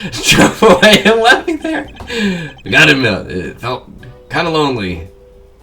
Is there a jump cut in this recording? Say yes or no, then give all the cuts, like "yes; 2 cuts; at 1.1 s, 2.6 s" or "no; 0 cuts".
no; 0 cuts